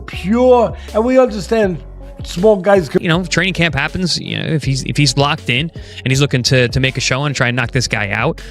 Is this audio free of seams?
no; 1 cut; at 3.0 s

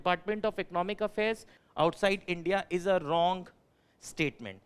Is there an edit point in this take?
yes; 1 cut; at 1.5 s

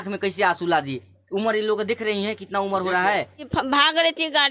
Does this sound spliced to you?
yes; 1 cut; at 3.5 s

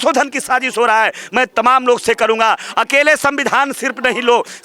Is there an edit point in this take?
no; 0 cuts

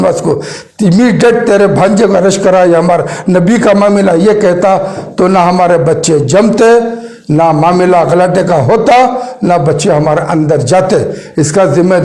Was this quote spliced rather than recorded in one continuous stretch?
no; 0 cuts

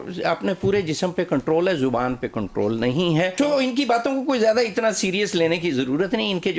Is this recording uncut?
yes; 0 cuts

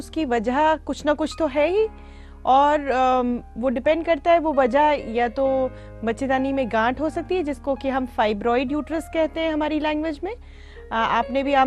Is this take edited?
no; 0 cuts

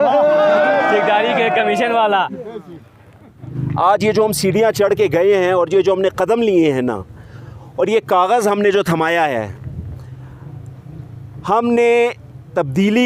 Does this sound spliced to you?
yes; 1 cut; at 3.5 s

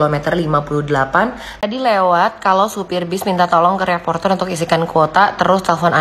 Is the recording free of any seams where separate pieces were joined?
no; 1 cut; at 1.5 s

